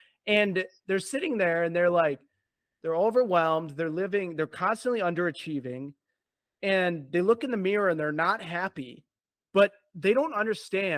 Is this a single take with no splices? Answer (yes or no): yes